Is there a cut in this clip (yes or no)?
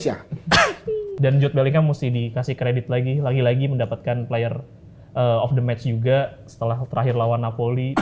yes